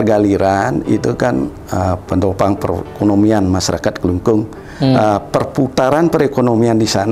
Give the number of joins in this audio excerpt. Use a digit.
0